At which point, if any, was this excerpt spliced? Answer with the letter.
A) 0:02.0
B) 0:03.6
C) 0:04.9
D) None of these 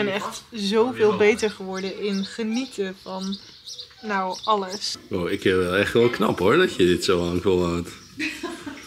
C